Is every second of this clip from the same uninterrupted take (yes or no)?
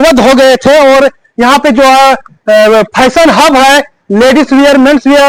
yes